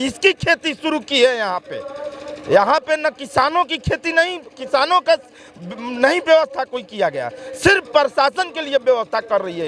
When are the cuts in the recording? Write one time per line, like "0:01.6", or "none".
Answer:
none